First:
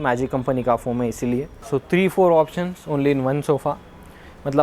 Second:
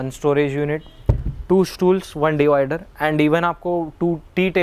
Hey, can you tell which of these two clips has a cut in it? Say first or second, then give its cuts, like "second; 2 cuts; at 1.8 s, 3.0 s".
first; 1 cut; at 1.6 s